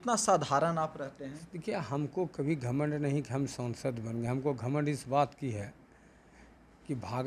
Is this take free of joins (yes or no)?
yes